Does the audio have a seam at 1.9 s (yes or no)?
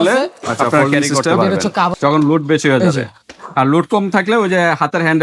yes